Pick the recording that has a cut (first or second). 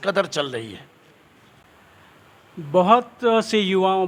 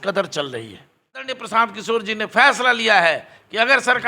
second